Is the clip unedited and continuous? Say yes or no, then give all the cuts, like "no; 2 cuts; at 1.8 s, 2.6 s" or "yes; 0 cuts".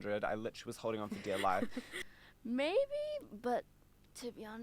no; 1 cut; at 1.9 s